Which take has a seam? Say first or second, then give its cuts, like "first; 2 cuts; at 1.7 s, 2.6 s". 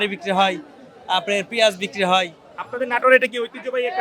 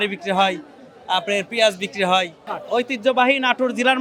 second; 1 cut; at 2.6 s